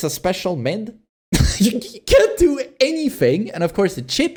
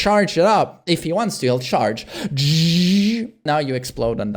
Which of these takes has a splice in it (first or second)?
second